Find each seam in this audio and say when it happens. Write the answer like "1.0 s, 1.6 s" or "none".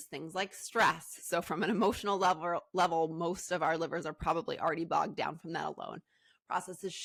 none